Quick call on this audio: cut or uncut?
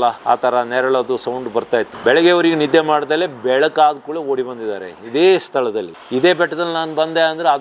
cut